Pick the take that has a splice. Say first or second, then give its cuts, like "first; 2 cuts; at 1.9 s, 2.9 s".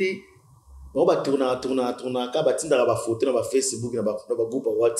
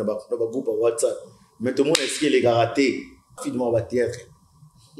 second; 1 cut; at 3.4 s